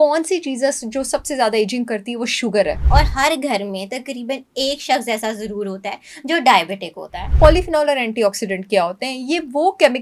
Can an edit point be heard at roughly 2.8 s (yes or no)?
yes